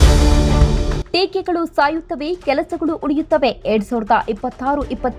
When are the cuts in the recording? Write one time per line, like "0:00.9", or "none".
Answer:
none